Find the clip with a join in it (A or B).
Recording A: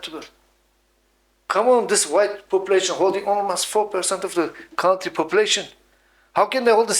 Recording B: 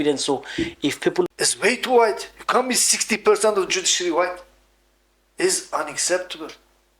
B